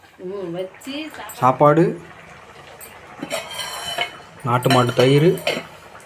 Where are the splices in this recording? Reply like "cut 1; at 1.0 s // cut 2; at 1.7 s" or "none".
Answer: cut 1; at 1.1 s